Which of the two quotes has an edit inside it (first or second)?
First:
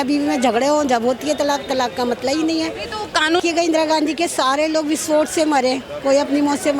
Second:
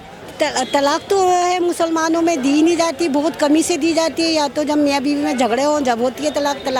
first